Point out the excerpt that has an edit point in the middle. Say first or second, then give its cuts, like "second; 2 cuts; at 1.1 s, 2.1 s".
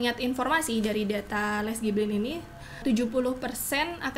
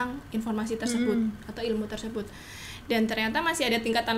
first; 1 cut; at 2.8 s